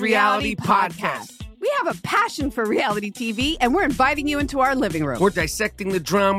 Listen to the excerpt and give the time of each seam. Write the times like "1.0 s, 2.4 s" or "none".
5.4 s